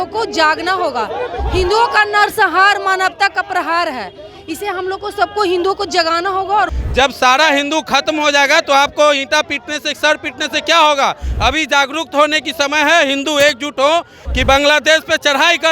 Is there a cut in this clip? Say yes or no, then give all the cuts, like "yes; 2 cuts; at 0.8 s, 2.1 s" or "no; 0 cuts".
yes; 2 cuts; at 6.8 s, 14.2 s